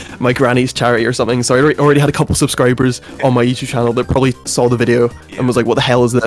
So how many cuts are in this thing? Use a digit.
1